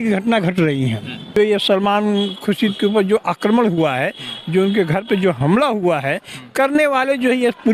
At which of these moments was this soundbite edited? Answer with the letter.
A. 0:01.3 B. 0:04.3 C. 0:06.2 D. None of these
A